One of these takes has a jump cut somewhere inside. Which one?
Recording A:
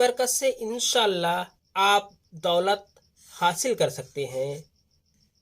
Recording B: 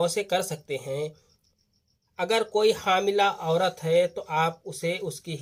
A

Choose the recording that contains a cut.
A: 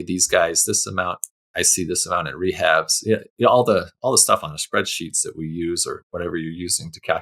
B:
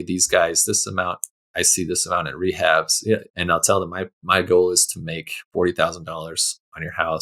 B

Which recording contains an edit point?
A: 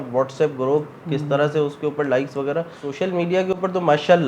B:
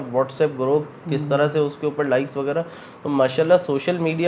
A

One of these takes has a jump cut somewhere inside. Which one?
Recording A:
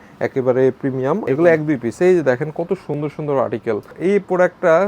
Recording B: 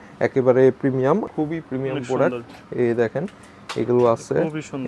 A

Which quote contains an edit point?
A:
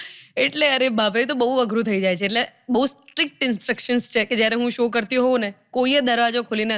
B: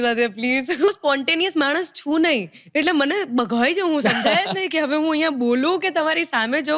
B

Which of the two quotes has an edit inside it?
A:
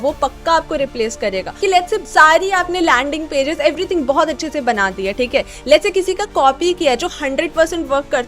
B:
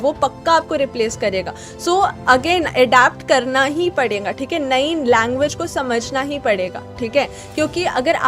A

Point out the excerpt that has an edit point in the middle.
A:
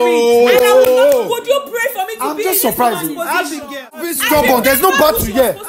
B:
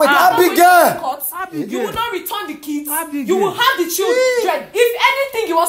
A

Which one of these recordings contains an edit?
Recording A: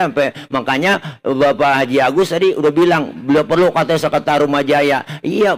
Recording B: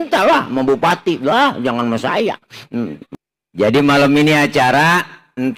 B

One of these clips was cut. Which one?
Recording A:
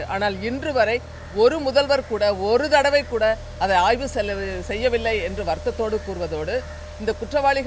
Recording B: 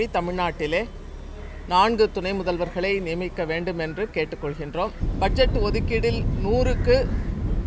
B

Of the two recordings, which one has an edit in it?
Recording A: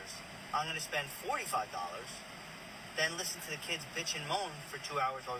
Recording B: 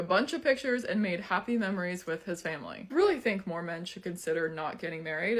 B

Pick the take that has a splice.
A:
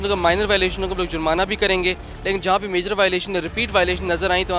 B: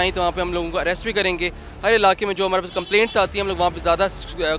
B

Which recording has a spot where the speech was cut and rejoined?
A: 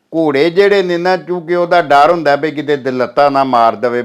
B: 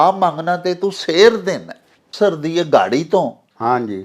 B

